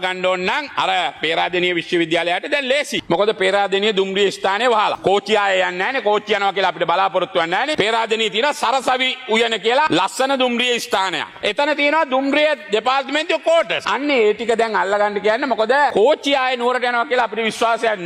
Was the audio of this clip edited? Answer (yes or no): no